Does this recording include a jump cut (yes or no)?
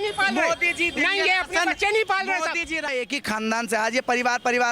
yes